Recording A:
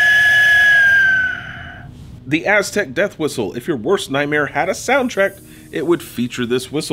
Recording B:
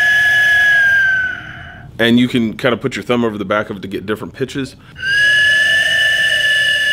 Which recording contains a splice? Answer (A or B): A